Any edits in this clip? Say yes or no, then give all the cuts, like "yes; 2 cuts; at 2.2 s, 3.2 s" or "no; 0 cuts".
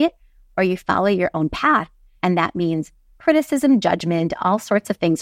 no; 0 cuts